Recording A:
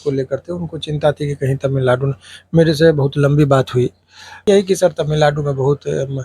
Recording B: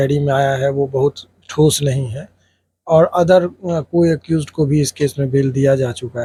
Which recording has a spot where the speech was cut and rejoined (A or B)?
A